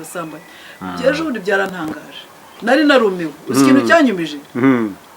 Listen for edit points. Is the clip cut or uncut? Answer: cut